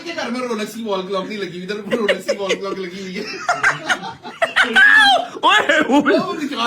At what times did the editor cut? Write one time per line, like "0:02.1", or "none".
0:04.2